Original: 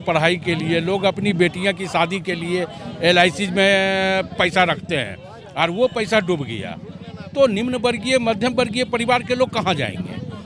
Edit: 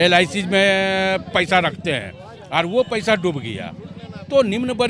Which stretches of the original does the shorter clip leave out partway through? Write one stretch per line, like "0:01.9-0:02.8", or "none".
none